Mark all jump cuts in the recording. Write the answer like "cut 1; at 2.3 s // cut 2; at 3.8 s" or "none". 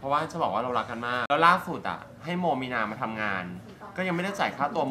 cut 1; at 1.2 s